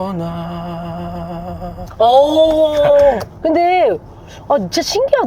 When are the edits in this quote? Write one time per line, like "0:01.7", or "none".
0:01.9
0:03.2

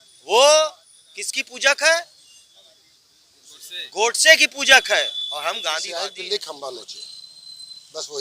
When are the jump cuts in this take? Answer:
0:05.8

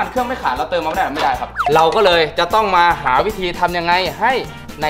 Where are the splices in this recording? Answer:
0:01.6

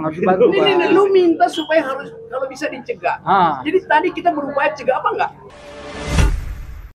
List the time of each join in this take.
0:05.4

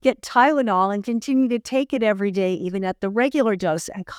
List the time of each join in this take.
none

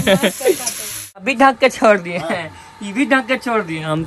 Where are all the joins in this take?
0:01.3

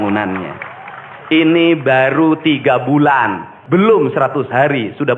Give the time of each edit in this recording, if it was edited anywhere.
0:03.5

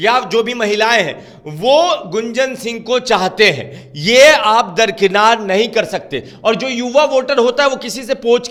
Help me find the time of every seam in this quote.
none

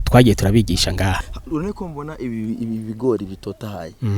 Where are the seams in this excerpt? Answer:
0:01.3

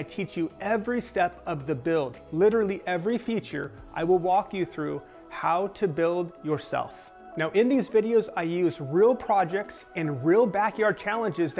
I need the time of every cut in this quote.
none

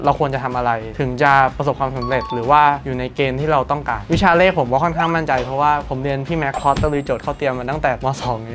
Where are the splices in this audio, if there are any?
0:04.0

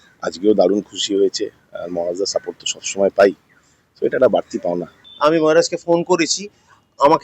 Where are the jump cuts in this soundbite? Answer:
0:05.0

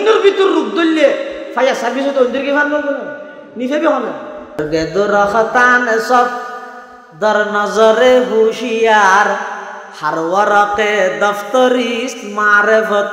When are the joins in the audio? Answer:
0:04.6

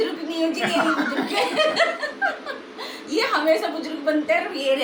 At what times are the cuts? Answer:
none

